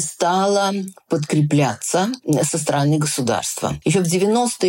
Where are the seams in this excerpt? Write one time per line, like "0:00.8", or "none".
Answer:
0:02.5
0:03.8